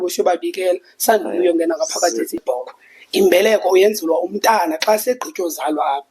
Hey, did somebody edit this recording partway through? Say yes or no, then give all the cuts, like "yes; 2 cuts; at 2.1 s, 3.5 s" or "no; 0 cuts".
yes; 1 cut; at 2.3 s